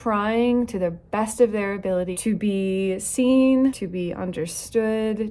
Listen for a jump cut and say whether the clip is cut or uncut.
cut